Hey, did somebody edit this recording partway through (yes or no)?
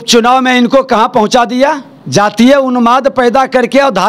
yes